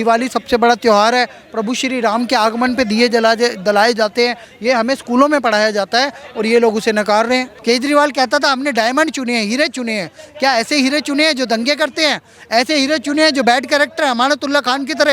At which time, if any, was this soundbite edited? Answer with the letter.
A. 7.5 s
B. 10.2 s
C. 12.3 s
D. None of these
A